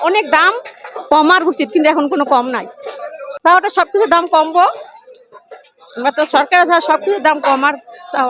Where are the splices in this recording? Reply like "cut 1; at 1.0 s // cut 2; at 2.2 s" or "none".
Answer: none